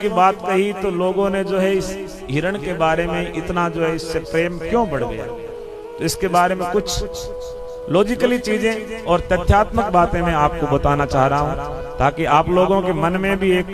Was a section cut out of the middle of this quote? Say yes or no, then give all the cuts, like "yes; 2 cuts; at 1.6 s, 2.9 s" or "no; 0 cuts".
no; 0 cuts